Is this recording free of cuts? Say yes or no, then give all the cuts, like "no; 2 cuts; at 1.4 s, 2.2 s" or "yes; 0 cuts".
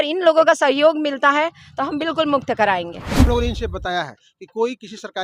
no; 1 cut; at 3.3 s